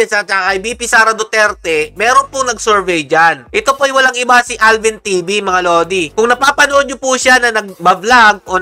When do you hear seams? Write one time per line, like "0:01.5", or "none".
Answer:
none